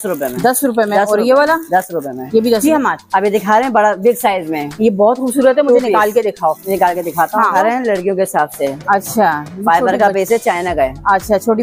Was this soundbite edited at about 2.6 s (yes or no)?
yes